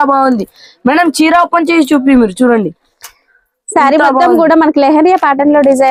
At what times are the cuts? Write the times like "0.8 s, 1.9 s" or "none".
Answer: none